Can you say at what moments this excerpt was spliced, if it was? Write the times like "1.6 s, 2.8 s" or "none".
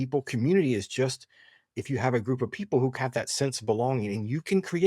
3.0 s